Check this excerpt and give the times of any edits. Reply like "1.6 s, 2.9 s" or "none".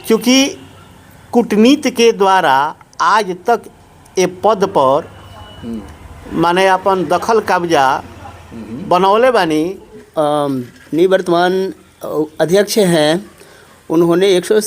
10.0 s